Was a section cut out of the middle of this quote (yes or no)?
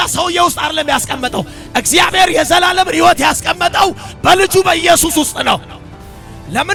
no